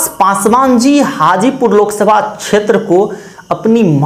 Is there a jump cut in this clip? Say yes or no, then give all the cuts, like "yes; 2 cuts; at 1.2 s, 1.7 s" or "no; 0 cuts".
no; 0 cuts